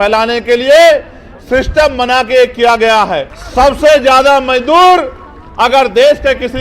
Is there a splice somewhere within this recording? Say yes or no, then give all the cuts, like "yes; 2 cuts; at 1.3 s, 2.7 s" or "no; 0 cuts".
yes; 1 cut; at 3.4 s